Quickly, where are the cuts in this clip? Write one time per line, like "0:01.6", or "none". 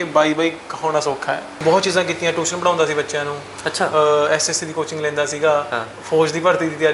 0:01.6

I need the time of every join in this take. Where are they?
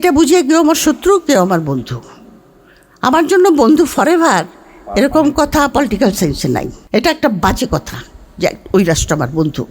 0:06.8

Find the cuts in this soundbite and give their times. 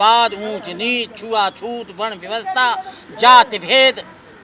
none

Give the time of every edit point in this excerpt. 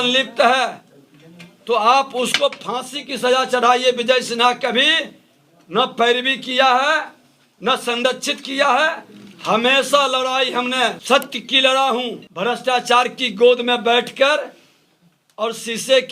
0:11.0
0:12.2

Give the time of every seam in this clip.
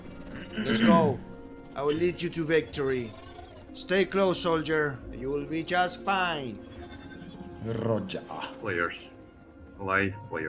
0:08.8

